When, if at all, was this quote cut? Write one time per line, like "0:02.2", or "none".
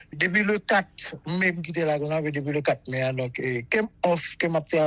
none